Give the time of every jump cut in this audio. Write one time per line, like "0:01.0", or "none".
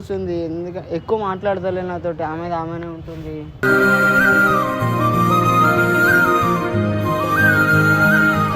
none

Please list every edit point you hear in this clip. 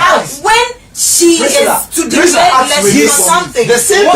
0:02.9

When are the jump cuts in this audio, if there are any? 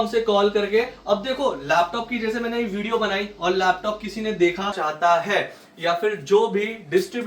0:04.8

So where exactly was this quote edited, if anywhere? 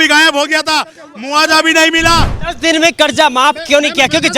0:02.4

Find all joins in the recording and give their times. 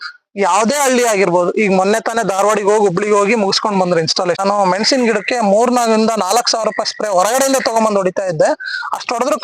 0:04.4

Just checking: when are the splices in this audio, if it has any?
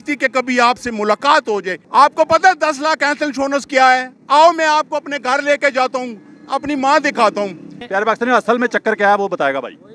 0:01.8
0:07.7

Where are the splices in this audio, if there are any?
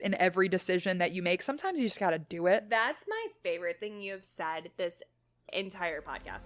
0:05.5

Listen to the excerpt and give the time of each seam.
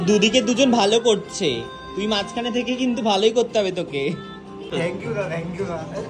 0:04.7

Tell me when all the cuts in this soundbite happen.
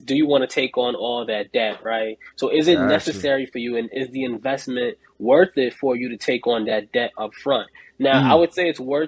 none

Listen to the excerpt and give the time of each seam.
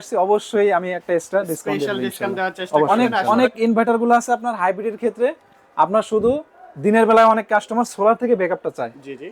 0:02.9

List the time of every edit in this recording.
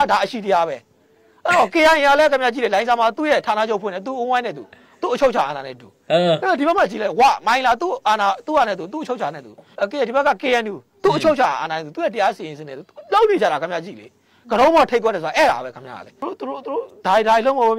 0:16.2

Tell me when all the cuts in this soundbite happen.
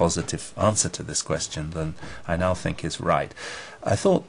0:02.5

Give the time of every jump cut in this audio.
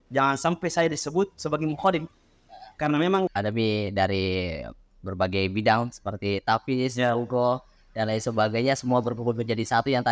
0:03.3

